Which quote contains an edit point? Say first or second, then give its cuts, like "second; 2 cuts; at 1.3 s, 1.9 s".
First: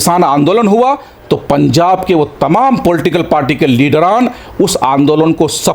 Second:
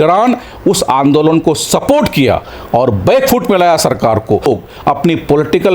second; 1 cut; at 4.5 s